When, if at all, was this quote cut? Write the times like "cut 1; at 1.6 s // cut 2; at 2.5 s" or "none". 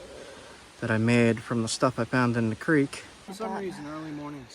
cut 1; at 3.2 s